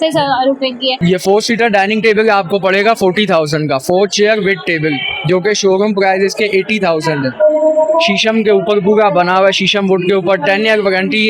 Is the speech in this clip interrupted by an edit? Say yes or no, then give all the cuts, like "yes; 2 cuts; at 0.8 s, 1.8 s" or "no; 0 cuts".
yes; 1 cut; at 1.0 s